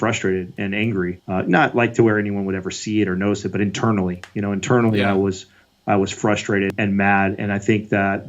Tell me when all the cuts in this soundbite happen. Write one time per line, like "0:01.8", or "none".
0:01.2
0:06.7